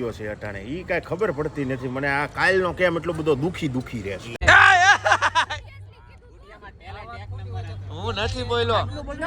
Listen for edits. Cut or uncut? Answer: cut